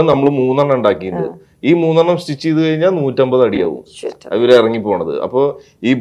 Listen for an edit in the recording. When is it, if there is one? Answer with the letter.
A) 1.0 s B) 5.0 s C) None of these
C